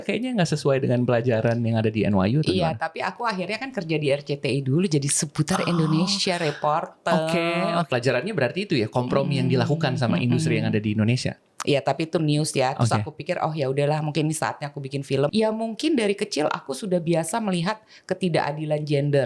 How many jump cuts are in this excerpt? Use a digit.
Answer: 2